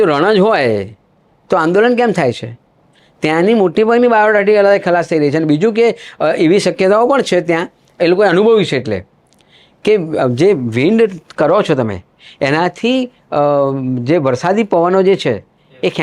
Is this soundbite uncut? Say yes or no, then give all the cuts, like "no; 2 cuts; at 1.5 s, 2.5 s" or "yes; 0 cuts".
yes; 0 cuts